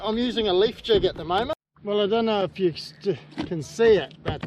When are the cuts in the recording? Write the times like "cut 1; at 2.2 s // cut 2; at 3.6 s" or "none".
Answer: cut 1; at 1.7 s